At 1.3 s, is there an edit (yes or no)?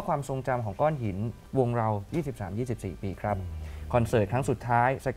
yes